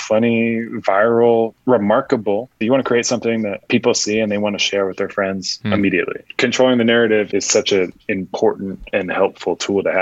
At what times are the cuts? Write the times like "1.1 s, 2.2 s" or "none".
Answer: 2.5 s, 3.6 s, 5.5 s, 6.3 s, 7.3 s, 8.8 s